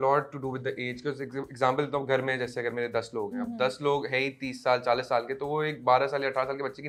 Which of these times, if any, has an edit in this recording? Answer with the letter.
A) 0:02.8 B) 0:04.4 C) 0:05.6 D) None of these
D